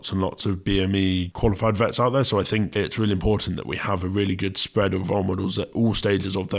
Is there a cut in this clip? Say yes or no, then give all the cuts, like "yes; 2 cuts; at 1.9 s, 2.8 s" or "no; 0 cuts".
yes; 2 cuts; at 1.3 s, 2.7 s